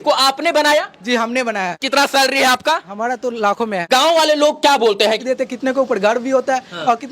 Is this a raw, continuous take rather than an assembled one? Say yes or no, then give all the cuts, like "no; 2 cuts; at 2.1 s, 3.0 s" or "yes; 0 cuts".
no; 3 cuts; at 1.8 s, 3.9 s, 5.2 s